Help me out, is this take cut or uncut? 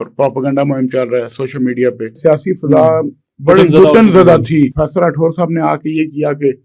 cut